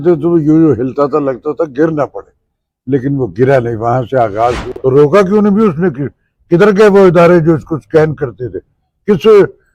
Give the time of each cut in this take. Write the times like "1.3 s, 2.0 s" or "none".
4.6 s